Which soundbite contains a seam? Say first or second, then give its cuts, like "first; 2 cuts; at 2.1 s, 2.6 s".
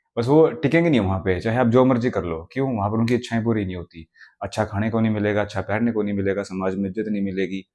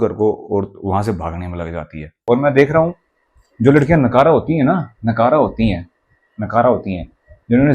second; 1 cut; at 2.2 s